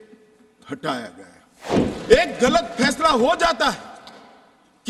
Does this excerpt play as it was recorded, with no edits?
no; 1 cut; at 1.6 s

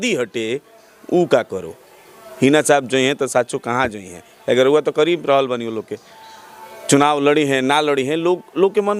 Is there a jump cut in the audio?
no; 0 cuts

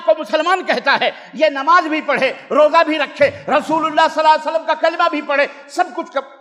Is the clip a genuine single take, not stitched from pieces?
yes; 0 cuts

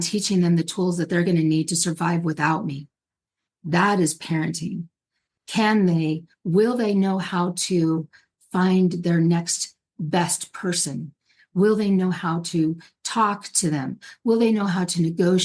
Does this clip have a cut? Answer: no; 0 cuts

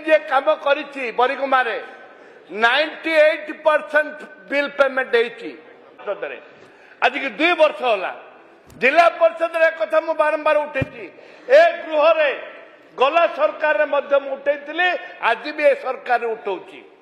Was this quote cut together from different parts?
yes; 1 cut; at 6.0 s

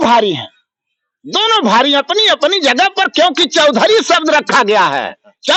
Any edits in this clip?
no; 0 cuts

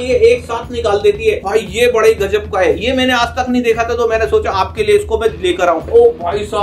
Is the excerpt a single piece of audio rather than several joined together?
no; 2 cuts; at 1.4 s, 5.9 s

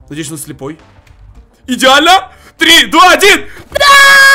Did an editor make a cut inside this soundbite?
no; 0 cuts

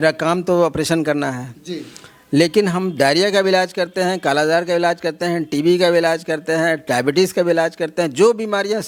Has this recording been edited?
no; 0 cuts

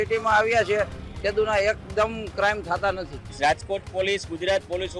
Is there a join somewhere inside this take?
yes; 1 cut; at 3.3 s

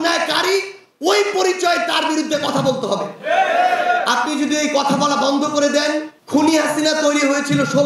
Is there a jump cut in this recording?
yes; 1 cut; at 6.1 s

